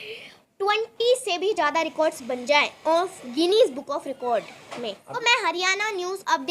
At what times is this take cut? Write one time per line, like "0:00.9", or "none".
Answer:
0:05.1